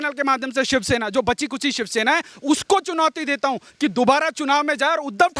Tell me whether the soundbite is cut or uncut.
uncut